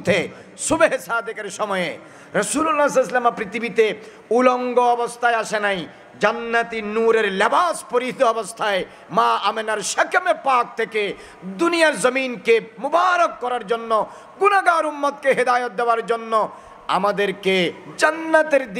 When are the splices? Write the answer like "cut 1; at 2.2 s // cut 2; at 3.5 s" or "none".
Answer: none